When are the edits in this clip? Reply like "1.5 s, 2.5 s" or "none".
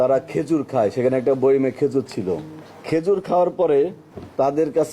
none